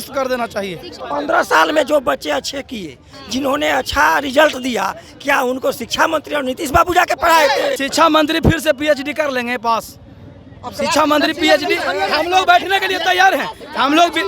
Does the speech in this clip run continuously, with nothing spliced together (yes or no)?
no